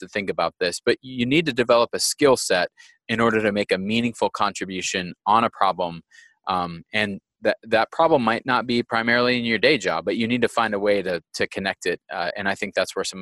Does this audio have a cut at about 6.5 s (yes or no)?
no